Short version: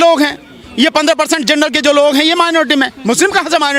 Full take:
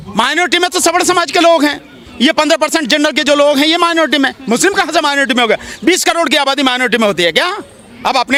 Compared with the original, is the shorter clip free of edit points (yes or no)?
yes